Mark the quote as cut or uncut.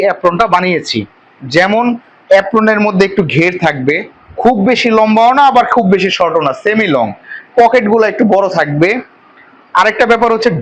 uncut